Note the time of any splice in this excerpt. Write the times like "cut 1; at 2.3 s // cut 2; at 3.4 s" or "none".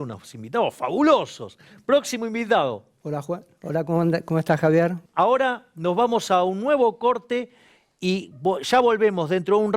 cut 1; at 5.0 s